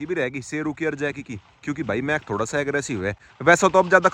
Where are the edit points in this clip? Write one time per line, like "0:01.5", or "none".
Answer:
none